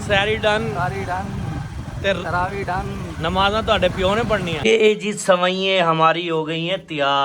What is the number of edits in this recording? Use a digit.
1